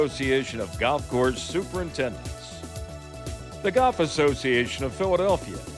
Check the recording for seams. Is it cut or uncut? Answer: uncut